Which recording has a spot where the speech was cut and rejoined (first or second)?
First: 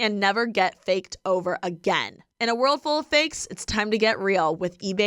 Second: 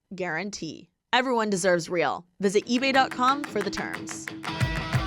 second